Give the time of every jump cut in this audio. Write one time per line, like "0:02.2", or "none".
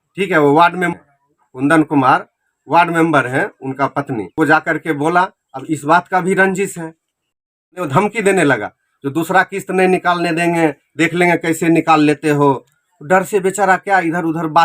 0:07.4